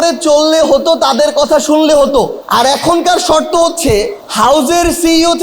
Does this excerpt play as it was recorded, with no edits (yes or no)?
no